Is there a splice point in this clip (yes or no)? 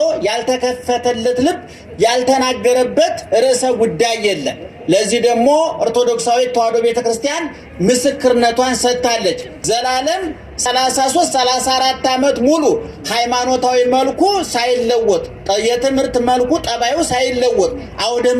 yes